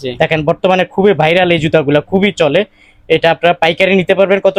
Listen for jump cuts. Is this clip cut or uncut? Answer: uncut